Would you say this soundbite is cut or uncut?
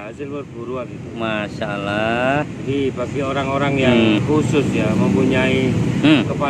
cut